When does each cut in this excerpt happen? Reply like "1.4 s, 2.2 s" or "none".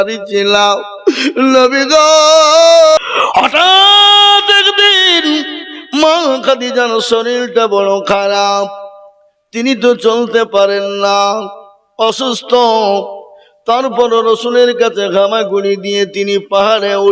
3.0 s